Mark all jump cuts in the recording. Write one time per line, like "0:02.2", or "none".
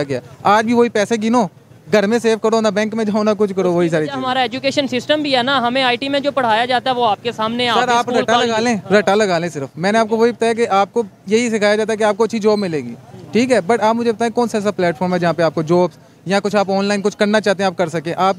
none